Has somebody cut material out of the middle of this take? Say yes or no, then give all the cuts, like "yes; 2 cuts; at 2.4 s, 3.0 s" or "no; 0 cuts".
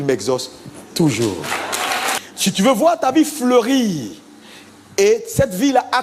yes; 1 cut; at 2.1 s